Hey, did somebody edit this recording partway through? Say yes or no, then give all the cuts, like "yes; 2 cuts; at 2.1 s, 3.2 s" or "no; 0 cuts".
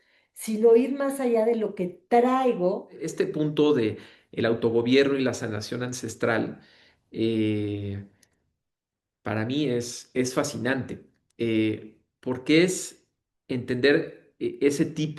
yes; 1 cut; at 3.1 s